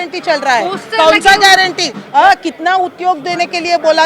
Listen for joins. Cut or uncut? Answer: cut